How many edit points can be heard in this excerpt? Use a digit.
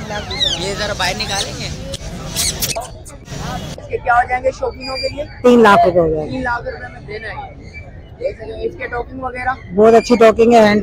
0